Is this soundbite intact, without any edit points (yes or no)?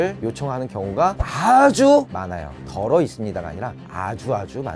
yes